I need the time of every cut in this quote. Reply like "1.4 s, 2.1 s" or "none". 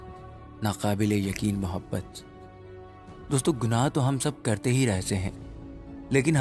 none